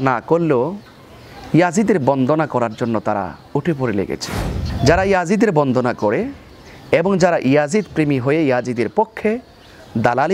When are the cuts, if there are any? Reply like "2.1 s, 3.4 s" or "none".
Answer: 4.7 s